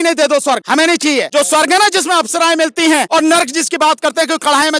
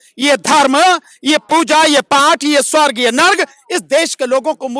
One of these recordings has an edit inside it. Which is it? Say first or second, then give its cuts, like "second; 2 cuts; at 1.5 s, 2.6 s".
first; 2 cuts; at 0.9 s, 3.1 s